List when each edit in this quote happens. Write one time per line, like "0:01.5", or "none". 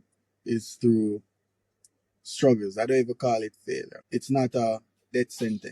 0:03.9